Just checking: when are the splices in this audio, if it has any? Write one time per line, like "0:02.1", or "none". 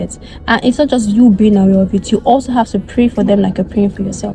none